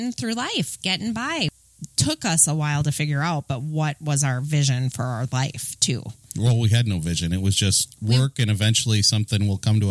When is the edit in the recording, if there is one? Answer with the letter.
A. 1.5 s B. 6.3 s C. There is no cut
A